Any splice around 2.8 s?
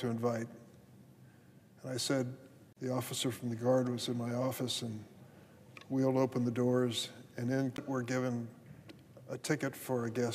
no; 0 cuts

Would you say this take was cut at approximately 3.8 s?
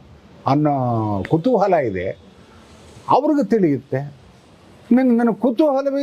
no; 0 cuts

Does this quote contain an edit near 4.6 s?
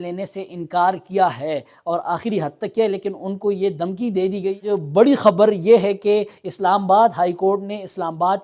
yes; 1 cut; at 4.6 s

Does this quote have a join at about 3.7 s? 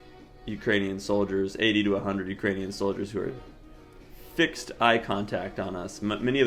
no; 0 cuts

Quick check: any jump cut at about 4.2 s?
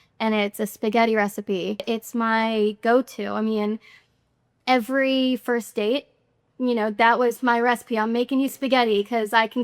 no; 1 cut; at 1.8 s

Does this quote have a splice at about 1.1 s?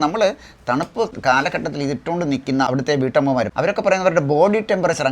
yes; 2 cuts; at 1.1 s, 2.7 s

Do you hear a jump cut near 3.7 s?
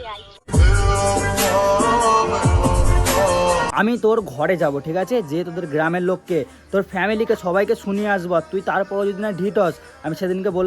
yes; 1 cut; at 3.7 s

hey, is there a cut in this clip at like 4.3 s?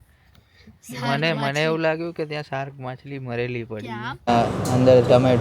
yes; 1 cut; at 4.3 s

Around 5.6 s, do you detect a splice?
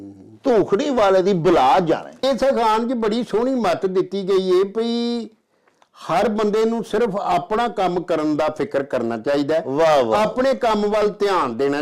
no; 1 cut; at 2.2 s

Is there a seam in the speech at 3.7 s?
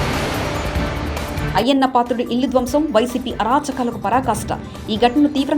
no; 1 cut; at 1.4 s

